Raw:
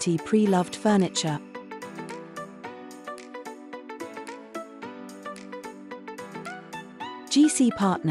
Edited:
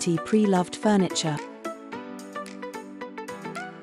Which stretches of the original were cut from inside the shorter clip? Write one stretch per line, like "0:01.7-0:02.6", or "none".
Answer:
0:01.4-0:04.3

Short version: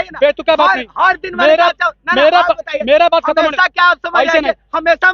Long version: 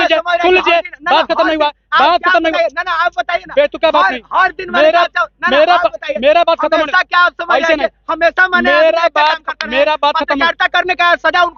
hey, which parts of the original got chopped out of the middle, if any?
none

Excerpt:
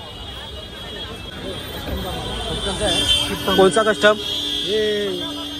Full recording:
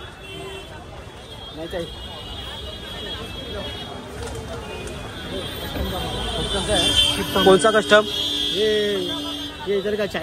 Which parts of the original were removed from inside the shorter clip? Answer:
0:03.4-0:05.2

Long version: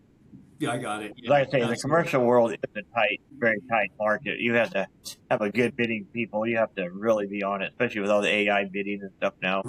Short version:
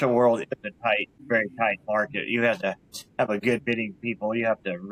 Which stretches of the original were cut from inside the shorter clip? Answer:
none

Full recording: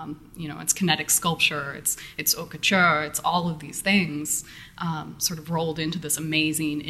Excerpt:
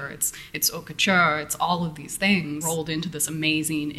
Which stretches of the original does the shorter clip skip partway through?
0:04.3-0:05.5

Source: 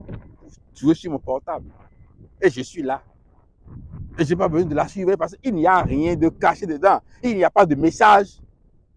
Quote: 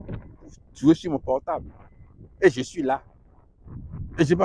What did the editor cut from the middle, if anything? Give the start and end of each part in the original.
none

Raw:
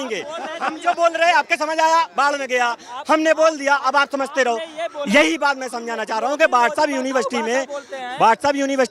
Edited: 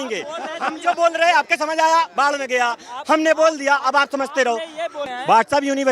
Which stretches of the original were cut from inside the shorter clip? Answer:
0:05.0-0:07.9

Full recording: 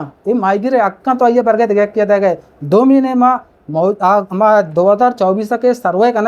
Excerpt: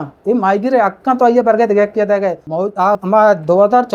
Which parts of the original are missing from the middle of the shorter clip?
0:02.7-0:04.0

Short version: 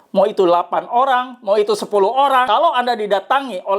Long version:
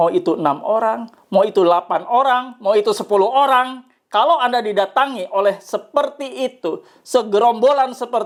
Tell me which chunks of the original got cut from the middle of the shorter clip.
0:03.6-0:04.1

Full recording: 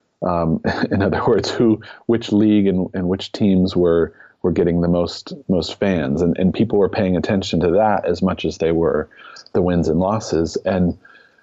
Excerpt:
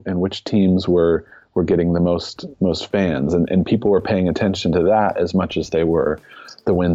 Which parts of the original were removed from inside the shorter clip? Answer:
none

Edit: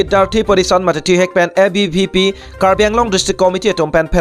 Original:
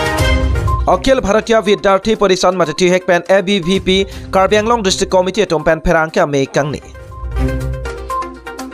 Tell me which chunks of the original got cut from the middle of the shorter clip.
none

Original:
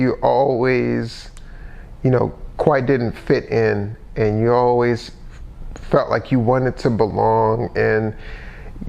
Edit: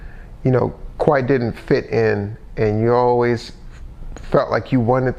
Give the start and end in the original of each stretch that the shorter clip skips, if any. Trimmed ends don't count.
none

